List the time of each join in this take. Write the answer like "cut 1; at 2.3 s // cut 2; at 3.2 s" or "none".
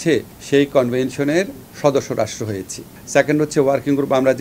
cut 1; at 3.0 s